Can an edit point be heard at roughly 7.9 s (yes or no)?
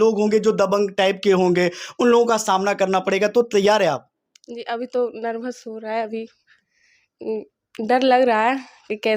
no